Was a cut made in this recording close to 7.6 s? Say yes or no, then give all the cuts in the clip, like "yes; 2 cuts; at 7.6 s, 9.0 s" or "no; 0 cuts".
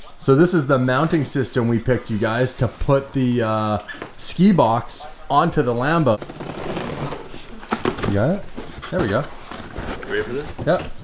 no; 1 cut; at 6.1 s